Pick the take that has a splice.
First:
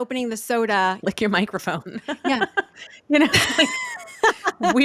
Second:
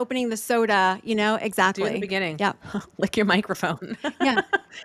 first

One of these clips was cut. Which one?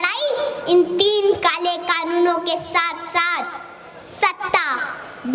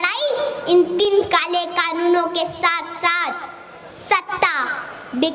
second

